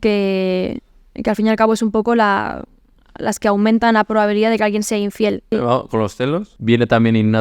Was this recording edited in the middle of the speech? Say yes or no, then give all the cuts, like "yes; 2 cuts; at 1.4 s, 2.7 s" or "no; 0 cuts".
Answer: yes; 2 cuts; at 5.5 s, 6.5 s